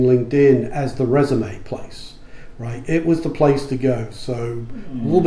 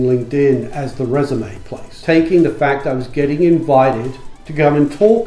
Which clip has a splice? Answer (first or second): second